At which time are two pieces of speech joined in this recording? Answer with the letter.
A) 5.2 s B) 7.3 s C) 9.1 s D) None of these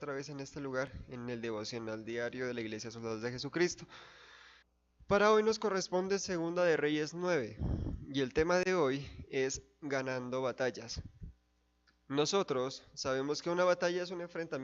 C